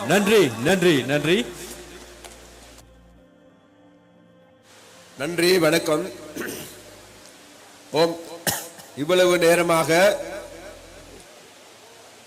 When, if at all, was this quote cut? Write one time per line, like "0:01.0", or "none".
0:02.8
0:05.1